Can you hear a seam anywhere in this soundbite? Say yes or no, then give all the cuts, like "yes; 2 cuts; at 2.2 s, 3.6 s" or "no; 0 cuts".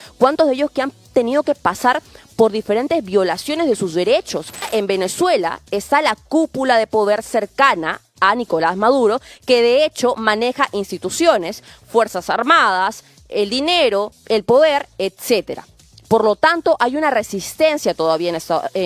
yes; 2 cuts; at 4.7 s, 14.2 s